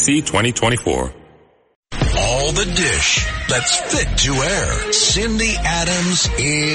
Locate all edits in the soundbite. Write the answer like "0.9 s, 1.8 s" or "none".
1.7 s